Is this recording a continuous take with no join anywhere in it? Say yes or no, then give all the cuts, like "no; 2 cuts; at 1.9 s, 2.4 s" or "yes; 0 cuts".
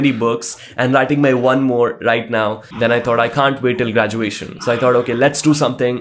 no; 2 cuts; at 2.6 s, 4.5 s